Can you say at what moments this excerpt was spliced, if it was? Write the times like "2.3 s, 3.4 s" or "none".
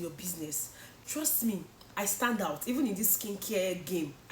1.0 s